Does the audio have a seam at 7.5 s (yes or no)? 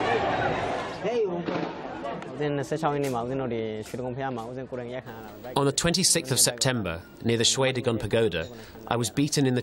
yes